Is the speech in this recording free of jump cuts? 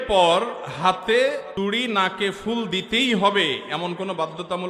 yes; 0 cuts

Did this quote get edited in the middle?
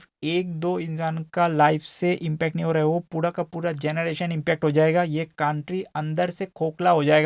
no; 0 cuts

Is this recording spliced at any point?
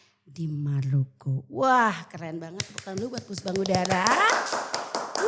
no; 0 cuts

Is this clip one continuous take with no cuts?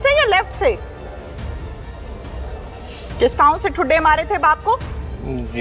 yes; 0 cuts

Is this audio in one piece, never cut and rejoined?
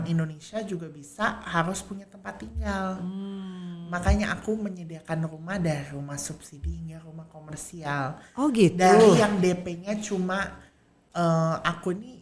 no; 1 cut; at 10.9 s

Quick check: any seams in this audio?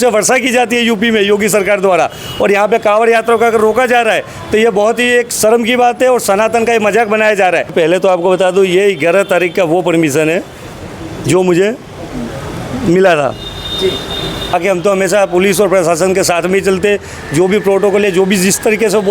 yes; 2 cuts; at 7.7 s, 14.5 s

